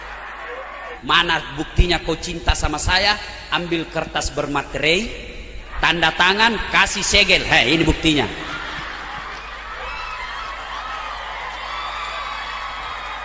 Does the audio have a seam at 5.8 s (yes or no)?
no